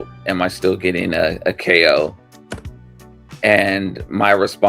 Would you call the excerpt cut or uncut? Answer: uncut